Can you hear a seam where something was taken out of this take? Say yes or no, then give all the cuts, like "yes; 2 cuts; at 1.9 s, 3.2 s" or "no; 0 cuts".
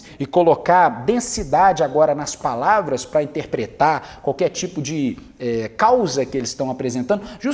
no; 0 cuts